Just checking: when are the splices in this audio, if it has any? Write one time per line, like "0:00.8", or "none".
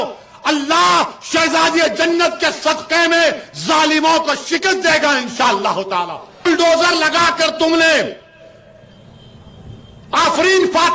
0:06.5